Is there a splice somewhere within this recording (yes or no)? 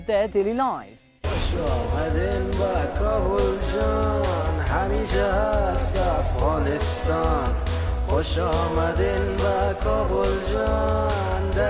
yes